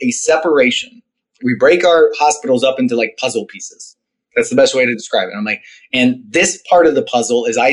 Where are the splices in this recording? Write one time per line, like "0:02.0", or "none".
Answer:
0:01.3